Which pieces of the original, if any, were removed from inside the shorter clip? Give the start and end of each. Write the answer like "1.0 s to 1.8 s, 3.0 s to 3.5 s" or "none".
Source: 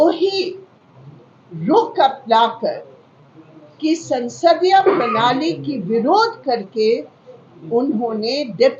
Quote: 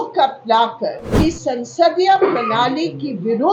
2.9 s to 3.7 s

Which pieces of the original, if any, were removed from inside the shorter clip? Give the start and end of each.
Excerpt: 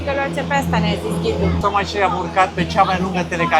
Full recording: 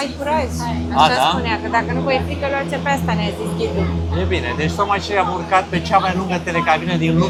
3.9 s to 4.7 s

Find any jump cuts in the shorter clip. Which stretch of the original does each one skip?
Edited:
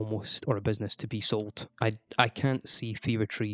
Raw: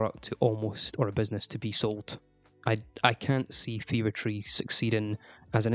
2.1 s to 2.5 s

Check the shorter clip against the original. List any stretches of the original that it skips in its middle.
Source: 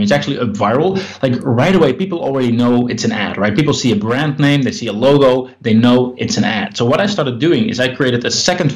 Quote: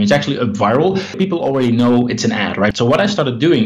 1.2 s to 2.0 s, 3.5 s to 6.7 s

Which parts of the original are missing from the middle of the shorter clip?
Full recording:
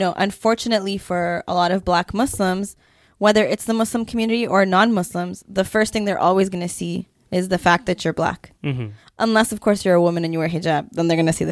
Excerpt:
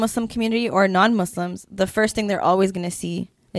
none

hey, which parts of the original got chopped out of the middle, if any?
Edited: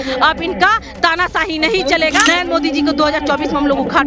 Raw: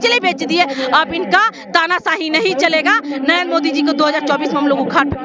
2.9 s to 3.2 s

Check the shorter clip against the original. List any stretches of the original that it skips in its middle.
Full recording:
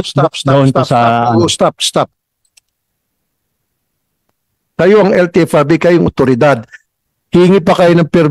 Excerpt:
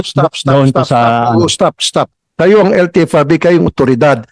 2.2 s to 4.6 s

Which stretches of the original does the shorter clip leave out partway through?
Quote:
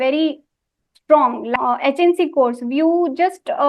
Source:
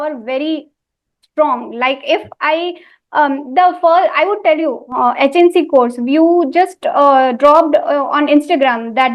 1.7 s to 4.8 s

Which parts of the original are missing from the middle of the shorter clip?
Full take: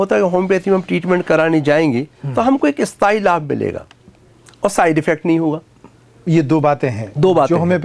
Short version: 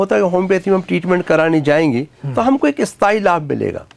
none

